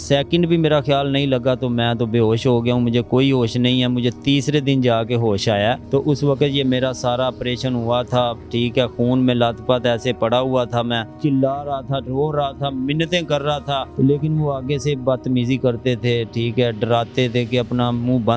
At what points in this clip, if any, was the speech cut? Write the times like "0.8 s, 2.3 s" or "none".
5.8 s, 11.1 s, 13.9 s